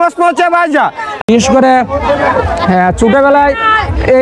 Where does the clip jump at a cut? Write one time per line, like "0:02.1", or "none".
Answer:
0:01.3

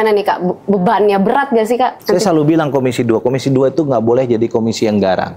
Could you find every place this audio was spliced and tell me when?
0:02.0

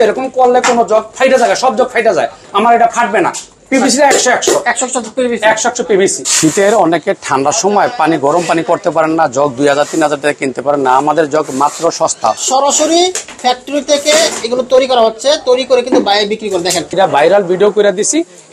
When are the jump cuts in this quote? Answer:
0:01.1
0:06.2
0:12.4
0:16.9

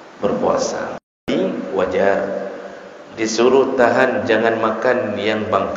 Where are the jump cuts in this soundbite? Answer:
0:01.3

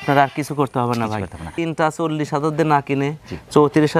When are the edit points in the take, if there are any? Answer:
0:01.4

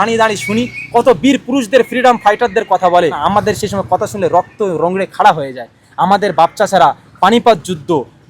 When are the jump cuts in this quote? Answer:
0:03.2

